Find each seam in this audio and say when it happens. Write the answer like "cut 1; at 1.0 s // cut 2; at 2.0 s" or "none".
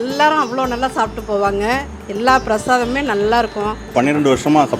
none